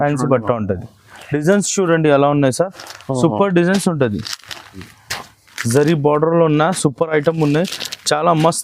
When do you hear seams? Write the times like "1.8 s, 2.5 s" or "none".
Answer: 1.2 s, 4.9 s